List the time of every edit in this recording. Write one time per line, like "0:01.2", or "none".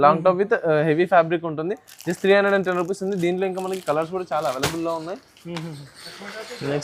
none